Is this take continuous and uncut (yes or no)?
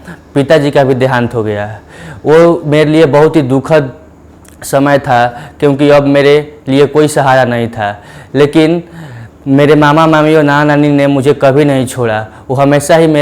yes